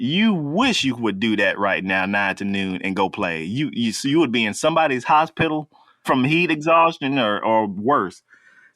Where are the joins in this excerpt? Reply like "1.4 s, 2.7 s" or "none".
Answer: 6.0 s